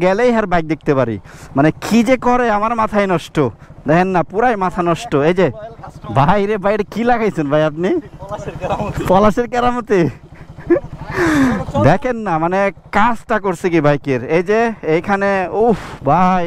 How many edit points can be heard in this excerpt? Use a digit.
0